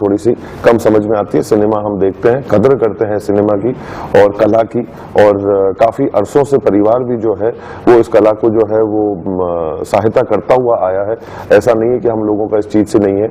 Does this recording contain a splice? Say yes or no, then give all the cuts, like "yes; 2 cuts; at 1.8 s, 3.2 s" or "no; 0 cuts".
no; 0 cuts